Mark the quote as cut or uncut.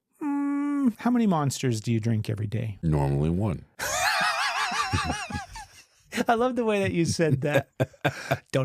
cut